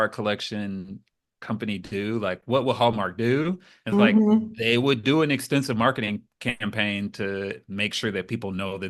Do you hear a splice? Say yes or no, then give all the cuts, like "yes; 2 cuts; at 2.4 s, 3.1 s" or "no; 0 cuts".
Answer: no; 0 cuts